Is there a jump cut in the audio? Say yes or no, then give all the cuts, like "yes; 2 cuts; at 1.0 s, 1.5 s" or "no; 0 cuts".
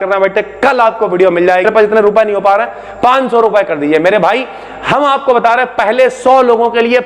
yes; 1 cut; at 1.6 s